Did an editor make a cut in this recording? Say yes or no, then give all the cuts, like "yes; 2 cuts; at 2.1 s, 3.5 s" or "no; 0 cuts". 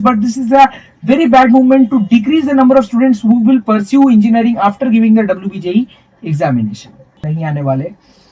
yes; 1 cut; at 7.2 s